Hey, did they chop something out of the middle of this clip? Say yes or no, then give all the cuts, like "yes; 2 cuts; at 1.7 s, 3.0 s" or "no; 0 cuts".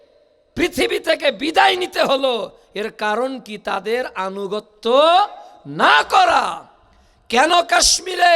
no; 0 cuts